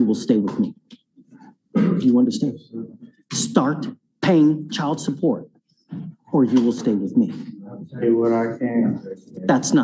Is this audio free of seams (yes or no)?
no